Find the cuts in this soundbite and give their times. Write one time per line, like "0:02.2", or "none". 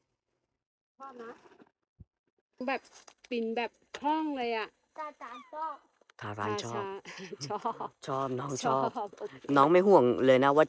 0:02.6